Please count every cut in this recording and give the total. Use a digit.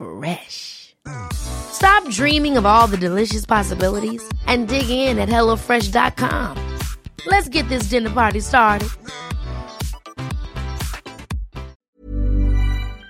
1